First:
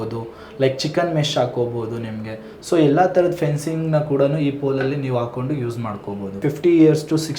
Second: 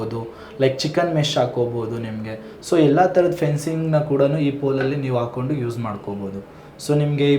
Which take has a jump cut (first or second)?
first